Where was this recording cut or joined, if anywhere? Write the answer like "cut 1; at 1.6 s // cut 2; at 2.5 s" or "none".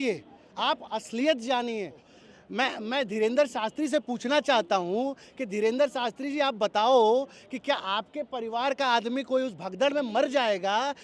cut 1; at 2.0 s